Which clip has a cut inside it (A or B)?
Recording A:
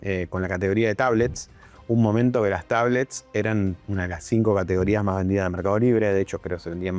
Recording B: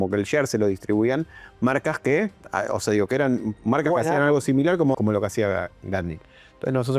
B